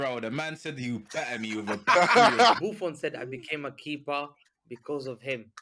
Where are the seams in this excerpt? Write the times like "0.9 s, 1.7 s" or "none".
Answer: 2.6 s